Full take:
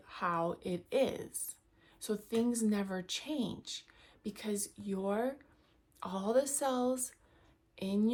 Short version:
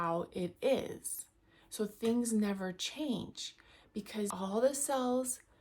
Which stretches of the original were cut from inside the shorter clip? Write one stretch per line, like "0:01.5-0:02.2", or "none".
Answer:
0:04.6-0:06.1